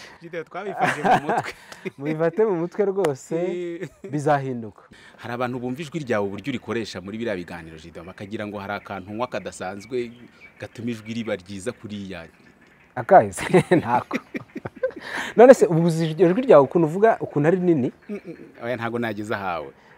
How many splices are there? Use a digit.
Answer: 1